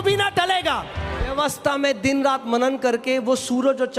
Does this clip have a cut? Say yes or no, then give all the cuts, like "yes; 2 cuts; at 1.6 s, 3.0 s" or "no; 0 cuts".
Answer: yes; 1 cut; at 1.3 s